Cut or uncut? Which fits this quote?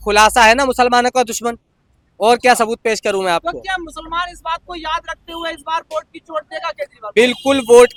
uncut